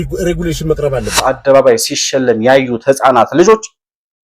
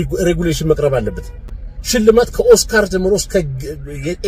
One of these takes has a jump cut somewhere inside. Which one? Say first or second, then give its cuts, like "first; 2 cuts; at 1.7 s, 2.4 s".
first; 1 cut; at 1.3 s